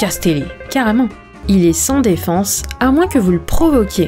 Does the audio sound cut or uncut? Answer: cut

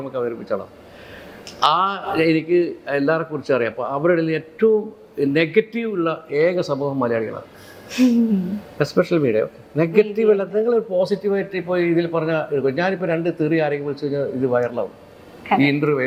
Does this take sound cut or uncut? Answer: uncut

